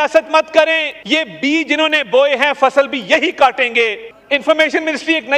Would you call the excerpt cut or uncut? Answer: cut